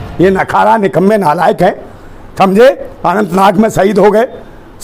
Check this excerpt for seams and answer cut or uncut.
uncut